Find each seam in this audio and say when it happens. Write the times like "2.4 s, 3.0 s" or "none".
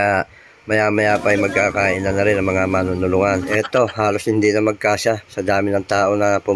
3.5 s

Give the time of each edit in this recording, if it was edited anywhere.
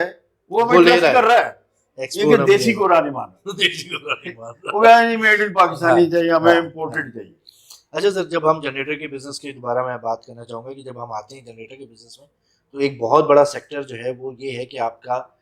none

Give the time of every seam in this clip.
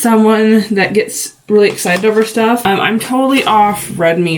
2.6 s

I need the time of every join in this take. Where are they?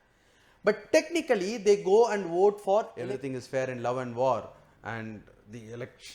2.9 s

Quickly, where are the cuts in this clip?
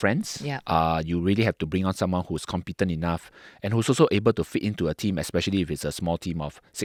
none

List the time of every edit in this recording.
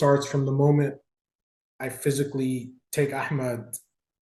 none

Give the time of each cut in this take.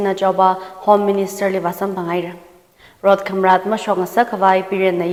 none

